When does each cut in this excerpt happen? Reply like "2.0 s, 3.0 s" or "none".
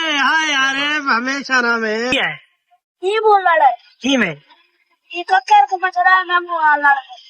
2.1 s